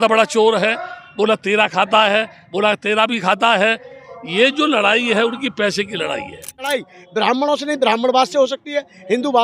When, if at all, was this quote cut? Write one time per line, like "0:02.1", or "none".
0:06.9